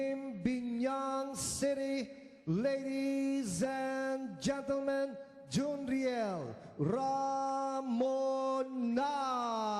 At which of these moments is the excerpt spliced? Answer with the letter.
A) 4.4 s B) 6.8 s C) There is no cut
A